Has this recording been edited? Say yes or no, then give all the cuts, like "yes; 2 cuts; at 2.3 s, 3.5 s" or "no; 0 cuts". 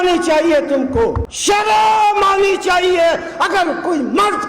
yes; 1 cut; at 1.3 s